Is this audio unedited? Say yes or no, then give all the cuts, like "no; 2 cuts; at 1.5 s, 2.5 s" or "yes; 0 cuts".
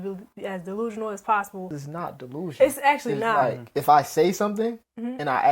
no; 2 cuts; at 1.8 s, 3.6 s